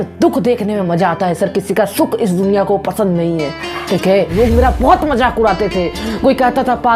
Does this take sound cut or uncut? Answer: cut